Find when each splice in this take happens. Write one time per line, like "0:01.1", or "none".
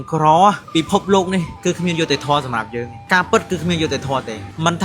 0:03.0